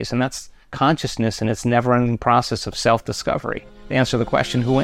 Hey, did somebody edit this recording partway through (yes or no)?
no